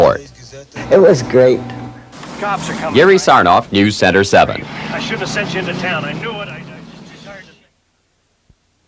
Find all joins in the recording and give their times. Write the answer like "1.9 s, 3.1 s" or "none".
6.8 s